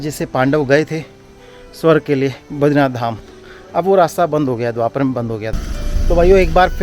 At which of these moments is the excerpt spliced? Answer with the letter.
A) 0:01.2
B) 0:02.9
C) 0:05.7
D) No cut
C